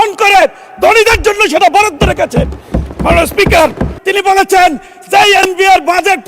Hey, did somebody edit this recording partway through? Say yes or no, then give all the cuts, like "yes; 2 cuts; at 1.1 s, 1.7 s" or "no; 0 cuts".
yes; 1 cut; at 3.9 s